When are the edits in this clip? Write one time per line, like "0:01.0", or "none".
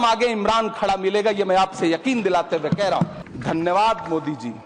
0:03.2

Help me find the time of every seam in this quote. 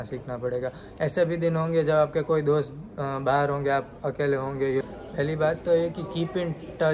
0:04.8

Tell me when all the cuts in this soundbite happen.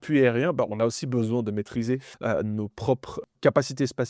0:02.1
0:03.3

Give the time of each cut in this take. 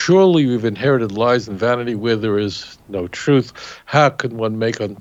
none

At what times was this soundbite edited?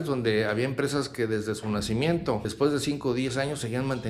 0:02.5

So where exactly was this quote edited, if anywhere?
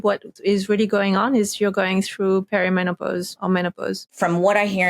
0:03.3
0:04.1

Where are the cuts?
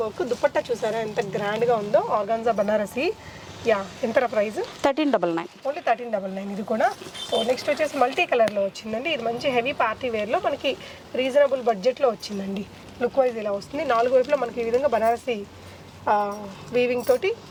none

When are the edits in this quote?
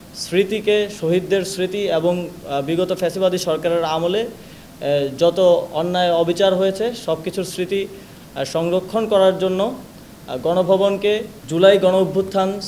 0:11.4

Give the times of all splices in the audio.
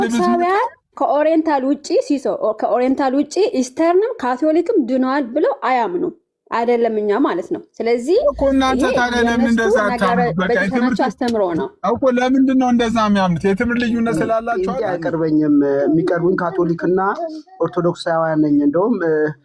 0:14.8

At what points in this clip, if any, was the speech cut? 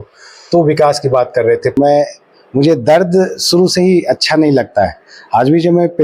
0:01.7

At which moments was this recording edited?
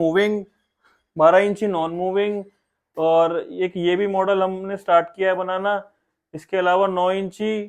none

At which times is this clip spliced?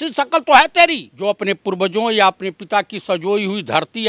0:01.1

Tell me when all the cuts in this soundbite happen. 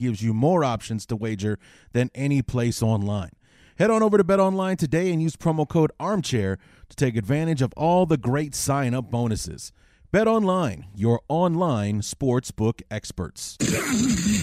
0:13.5

